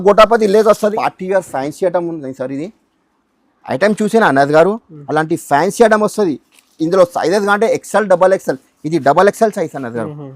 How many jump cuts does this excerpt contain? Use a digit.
1